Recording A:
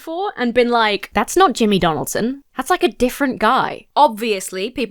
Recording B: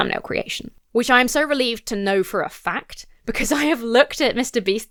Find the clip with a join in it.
A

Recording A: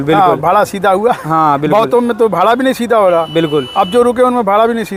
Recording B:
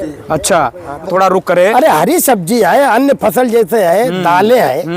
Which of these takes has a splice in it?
B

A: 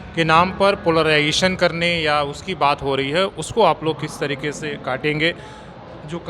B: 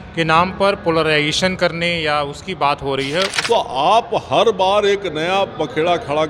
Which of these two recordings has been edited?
B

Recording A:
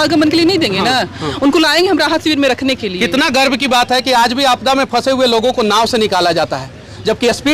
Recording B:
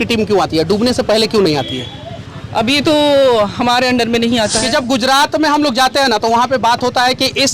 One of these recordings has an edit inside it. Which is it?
B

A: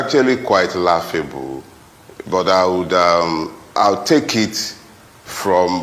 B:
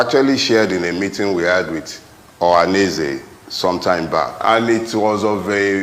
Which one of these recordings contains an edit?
B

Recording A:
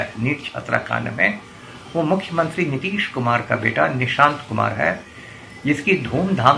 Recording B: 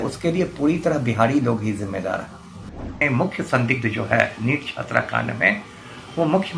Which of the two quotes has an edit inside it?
B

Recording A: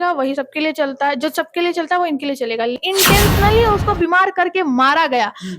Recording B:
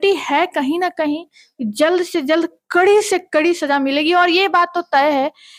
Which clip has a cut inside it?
A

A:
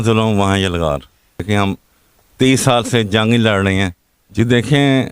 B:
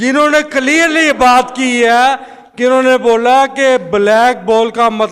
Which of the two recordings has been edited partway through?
A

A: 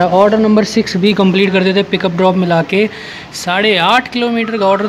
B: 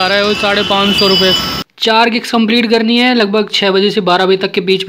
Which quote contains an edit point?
B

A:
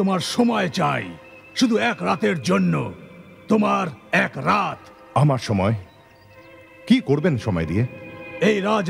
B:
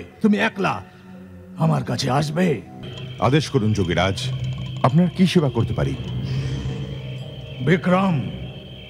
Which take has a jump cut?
B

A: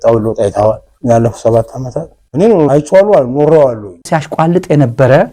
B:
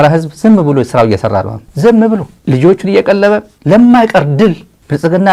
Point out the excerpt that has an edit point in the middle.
A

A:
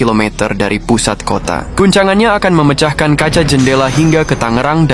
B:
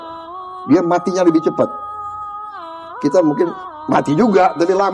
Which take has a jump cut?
A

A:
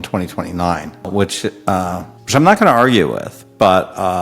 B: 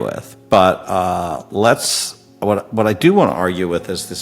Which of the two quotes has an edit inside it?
A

